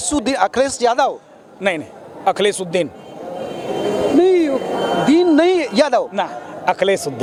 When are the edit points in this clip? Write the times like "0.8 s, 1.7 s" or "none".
none